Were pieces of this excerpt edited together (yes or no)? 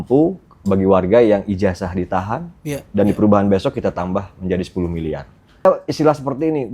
yes